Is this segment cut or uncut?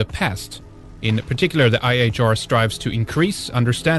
cut